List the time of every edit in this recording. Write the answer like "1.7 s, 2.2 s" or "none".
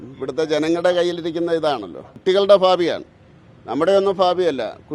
2.1 s

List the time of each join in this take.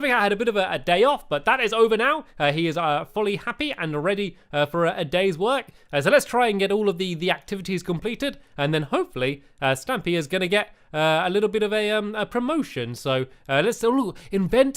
5.6 s

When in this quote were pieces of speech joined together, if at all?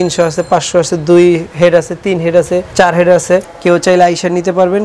2.7 s, 3.5 s

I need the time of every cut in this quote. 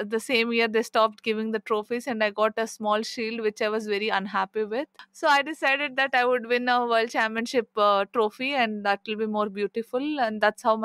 5.0 s

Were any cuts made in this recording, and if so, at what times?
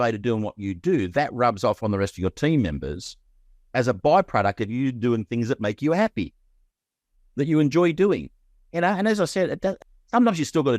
9.8 s

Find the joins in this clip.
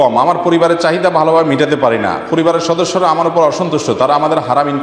none

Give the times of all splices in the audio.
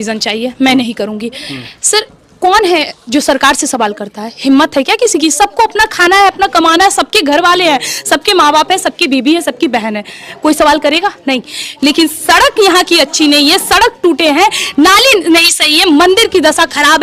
none

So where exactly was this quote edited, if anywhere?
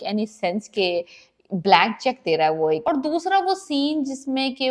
2.8 s

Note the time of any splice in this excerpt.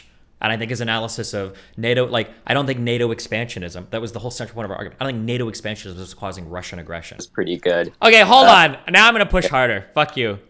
7.3 s

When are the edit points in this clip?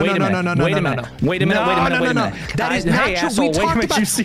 2.5 s

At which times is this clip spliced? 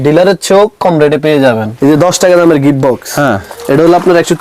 1.7 s

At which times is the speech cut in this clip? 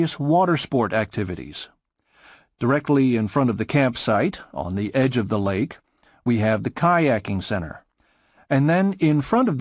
none

